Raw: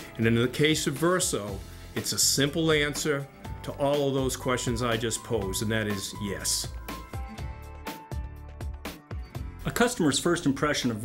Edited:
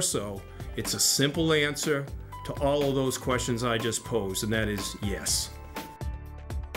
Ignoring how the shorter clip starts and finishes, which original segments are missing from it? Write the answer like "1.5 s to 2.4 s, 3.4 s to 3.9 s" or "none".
6.5 s to 7.4 s